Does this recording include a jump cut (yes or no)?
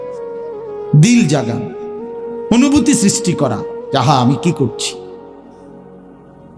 no